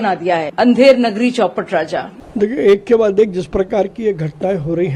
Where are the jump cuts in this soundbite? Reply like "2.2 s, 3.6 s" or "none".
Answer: 2.2 s